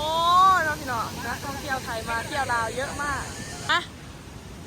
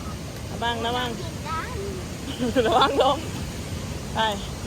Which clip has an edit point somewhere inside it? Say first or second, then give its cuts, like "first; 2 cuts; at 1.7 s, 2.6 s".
first; 1 cut; at 3.7 s